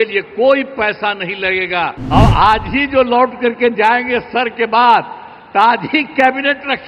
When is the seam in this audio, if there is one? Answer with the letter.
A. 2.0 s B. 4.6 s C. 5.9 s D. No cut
A